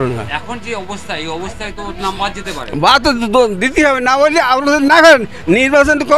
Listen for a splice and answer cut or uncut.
uncut